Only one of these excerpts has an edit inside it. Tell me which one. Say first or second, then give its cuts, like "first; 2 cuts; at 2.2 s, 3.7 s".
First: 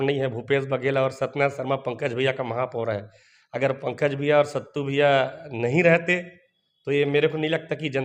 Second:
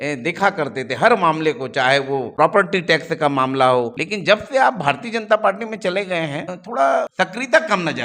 second; 4 cuts; at 2.2 s, 3.9 s, 6.6 s, 7.1 s